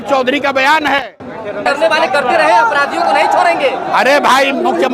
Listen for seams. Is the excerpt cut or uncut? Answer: cut